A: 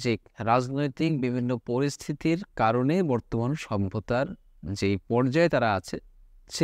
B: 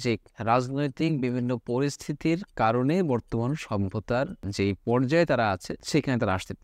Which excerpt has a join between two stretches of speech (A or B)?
B